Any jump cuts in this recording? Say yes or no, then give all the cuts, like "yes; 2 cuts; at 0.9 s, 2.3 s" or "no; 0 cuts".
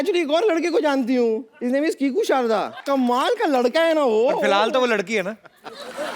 yes; 2 cuts; at 1.5 s, 2.8 s